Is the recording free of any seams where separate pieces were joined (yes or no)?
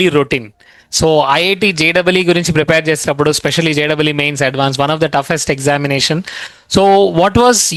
yes